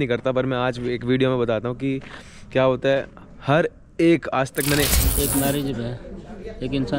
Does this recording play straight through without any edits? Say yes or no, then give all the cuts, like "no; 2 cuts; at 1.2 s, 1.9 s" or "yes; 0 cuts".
no; 1 cut; at 5.0 s